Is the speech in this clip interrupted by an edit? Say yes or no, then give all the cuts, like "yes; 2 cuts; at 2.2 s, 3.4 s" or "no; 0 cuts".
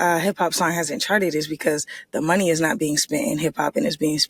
no; 0 cuts